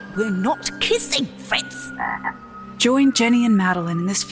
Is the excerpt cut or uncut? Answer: uncut